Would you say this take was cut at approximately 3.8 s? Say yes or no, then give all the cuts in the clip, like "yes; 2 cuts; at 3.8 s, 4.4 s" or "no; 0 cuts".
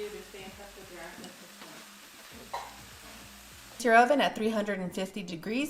yes; 1 cut; at 3.8 s